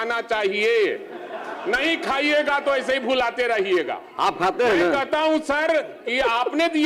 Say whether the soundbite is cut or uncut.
uncut